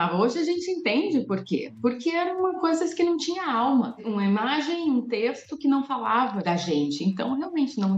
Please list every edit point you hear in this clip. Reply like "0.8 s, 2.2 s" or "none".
none